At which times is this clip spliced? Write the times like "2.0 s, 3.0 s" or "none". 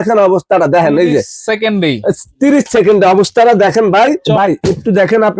4.2 s

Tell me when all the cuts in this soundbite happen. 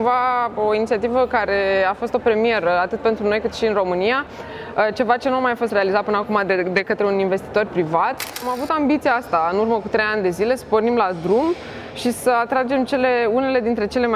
8.5 s

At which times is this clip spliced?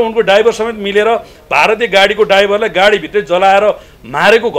none

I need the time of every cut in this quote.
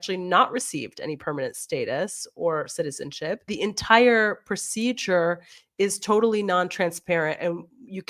3.5 s

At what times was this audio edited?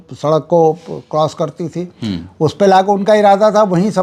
none

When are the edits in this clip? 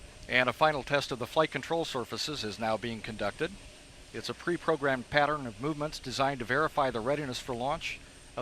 6.5 s

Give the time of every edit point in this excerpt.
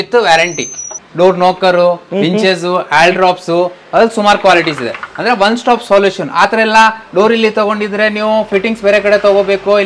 1.0 s

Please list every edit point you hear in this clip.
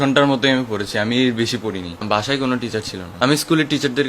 2.0 s, 3.0 s

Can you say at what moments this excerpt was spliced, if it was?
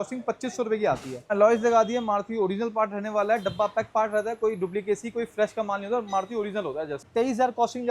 1.3 s, 7.0 s

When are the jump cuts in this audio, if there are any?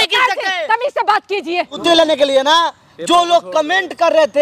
1.8 s

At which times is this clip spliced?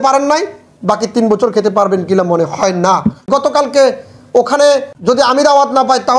3.3 s, 4.9 s

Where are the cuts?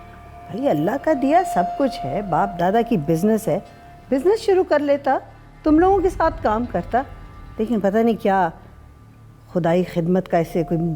none

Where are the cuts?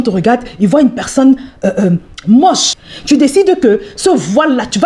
2.7 s

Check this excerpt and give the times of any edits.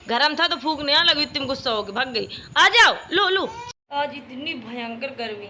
3.7 s

